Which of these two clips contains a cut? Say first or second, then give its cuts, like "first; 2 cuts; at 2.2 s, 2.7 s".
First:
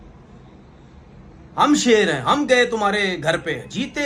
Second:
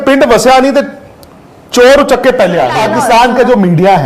second; 1 cut; at 2.8 s